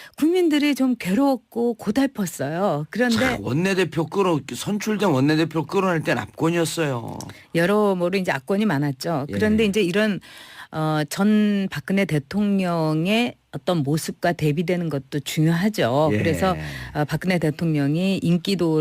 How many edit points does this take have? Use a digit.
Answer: 1